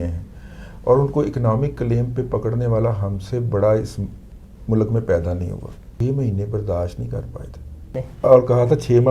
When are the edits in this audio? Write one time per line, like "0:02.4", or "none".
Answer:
0:06.0
0:08.0

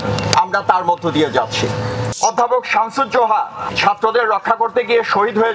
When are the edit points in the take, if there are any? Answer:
0:02.1
0:03.6

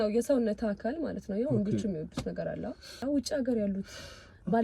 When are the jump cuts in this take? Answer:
0:03.0

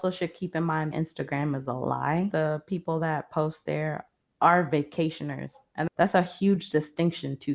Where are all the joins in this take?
0:00.9
0:05.9

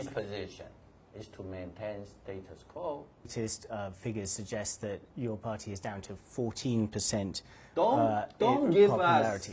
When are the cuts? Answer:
0:03.3

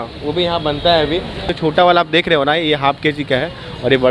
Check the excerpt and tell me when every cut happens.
0:01.4

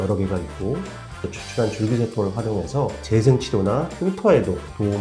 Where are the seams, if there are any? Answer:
0:01.2
0:03.0
0:03.9

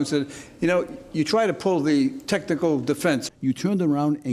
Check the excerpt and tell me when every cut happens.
0:03.3

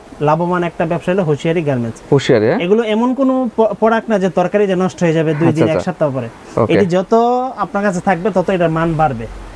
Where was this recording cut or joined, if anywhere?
none

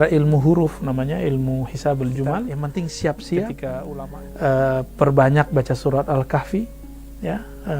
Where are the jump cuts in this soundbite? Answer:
0:02.6

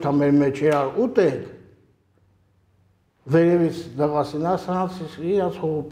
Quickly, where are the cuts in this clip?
none

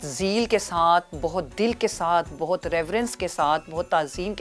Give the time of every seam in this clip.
none

